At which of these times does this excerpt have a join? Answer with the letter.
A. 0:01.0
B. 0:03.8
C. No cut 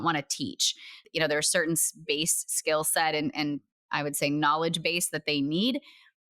A